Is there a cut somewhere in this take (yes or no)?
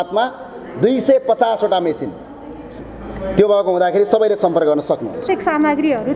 yes